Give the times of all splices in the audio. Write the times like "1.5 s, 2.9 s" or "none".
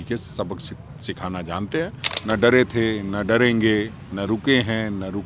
2.1 s